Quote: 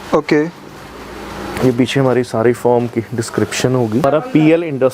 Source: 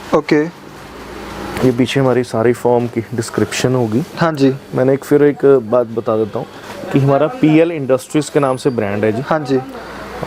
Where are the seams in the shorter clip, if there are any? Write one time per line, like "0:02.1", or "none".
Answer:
0:04.0